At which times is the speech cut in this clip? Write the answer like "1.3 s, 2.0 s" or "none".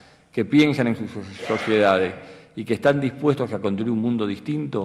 1.9 s